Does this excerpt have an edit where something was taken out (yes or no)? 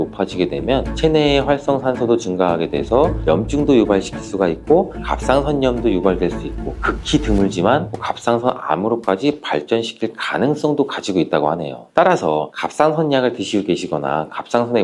no